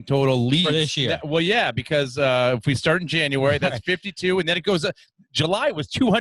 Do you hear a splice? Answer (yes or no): no